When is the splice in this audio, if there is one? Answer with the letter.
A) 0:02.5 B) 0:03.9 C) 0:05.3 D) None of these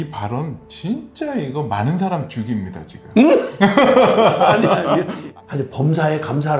C